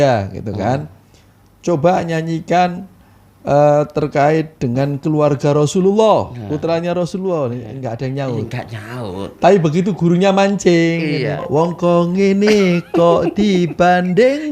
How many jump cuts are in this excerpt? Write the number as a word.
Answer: one